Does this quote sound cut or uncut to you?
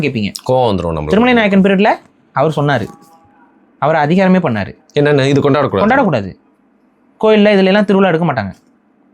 uncut